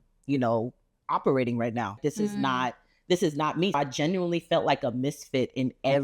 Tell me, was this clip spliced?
yes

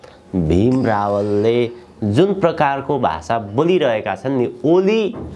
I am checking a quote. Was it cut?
no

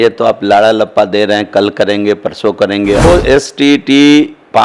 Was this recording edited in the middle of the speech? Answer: yes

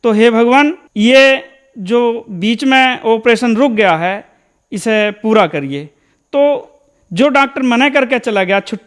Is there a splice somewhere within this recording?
no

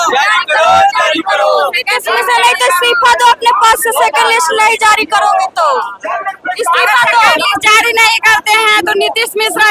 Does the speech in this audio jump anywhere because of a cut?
no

